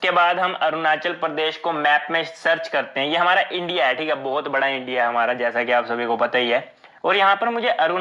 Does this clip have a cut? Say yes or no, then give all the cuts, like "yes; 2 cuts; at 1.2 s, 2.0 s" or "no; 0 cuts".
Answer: no; 0 cuts